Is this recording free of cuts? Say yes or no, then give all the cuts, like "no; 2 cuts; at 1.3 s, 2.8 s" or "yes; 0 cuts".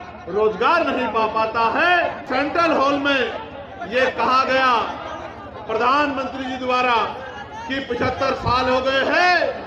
no; 1 cut; at 2.2 s